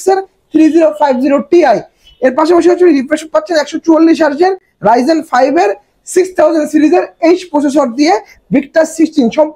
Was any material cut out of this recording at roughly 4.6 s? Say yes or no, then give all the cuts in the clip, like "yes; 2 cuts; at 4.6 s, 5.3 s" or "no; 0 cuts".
no; 0 cuts